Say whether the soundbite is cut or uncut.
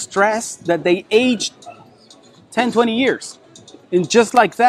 uncut